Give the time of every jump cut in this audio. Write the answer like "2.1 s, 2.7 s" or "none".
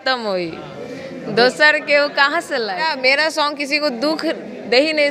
2.9 s